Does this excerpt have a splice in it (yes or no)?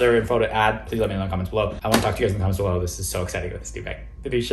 yes